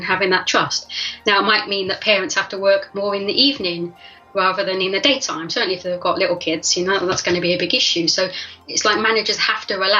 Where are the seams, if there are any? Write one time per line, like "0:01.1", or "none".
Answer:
0:08.5